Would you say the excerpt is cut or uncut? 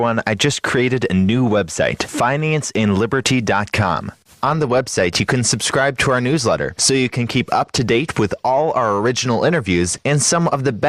uncut